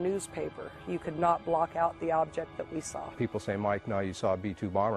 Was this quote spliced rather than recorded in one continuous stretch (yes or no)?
no